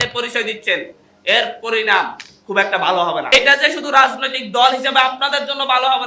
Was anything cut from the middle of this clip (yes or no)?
yes